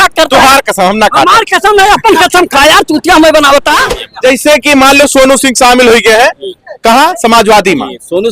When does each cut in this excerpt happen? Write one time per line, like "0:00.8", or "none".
0:04.0